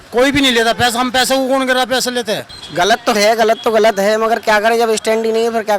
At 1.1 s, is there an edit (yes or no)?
no